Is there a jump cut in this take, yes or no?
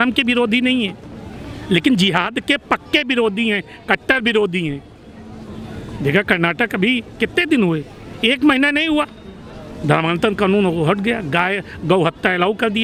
no